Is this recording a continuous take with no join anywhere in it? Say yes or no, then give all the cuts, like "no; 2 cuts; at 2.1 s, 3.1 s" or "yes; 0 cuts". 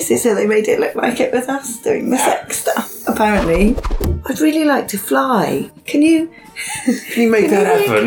no; 2 cuts; at 3.9 s, 5.7 s